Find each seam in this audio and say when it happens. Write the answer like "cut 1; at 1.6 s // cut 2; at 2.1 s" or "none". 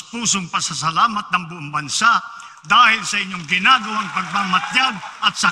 none